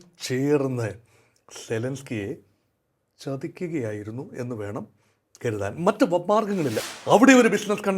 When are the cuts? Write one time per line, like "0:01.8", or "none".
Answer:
0:06.8